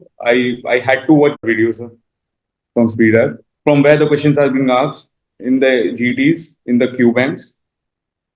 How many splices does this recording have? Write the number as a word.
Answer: two